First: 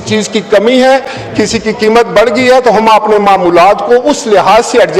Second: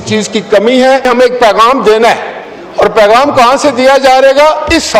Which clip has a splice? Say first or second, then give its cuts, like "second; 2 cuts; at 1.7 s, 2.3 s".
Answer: second; 1 cut; at 1.0 s